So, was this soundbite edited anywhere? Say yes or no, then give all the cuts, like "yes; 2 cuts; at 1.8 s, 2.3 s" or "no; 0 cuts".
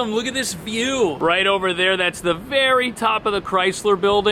no; 0 cuts